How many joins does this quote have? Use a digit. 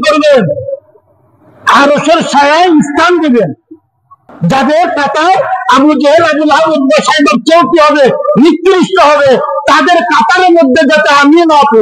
1